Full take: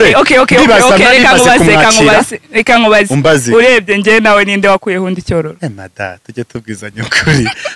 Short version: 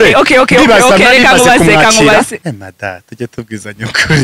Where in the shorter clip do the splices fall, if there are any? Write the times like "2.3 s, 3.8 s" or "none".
2.4 s